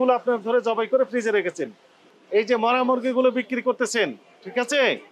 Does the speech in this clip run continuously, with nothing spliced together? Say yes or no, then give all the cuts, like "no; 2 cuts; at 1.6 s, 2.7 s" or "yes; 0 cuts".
no; 1 cut; at 2.1 s